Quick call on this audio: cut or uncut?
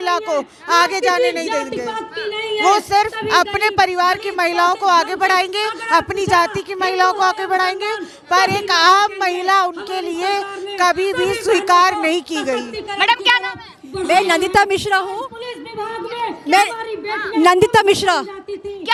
uncut